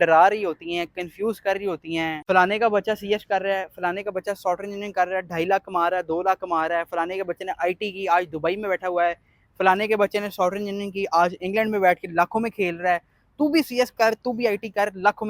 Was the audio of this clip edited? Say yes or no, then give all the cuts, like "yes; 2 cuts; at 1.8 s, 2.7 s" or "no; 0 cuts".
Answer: yes; 1 cut; at 2.2 s